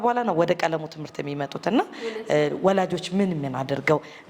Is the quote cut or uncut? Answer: uncut